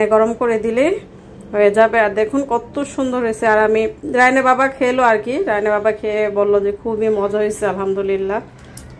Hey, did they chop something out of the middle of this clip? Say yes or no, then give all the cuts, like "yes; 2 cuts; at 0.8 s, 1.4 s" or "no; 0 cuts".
no; 0 cuts